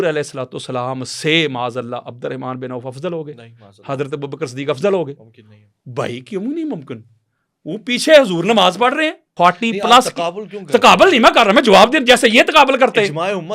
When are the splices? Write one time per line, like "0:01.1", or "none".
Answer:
0:09.2